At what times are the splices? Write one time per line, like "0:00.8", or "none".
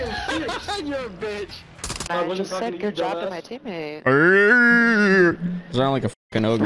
0:02.1